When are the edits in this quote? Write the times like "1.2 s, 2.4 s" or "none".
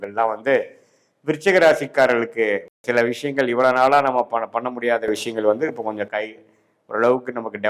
2.7 s